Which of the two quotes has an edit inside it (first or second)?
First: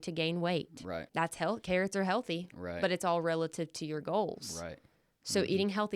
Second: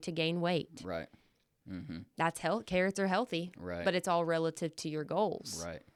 first